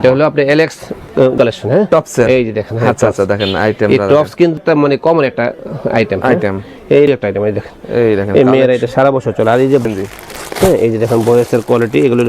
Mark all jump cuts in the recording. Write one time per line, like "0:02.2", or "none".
0:01.3
0:04.5
0:07.1
0:09.9